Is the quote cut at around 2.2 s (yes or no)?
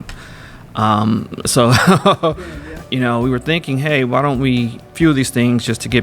yes